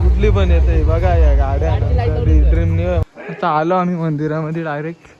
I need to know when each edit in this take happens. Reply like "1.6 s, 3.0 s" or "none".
3.0 s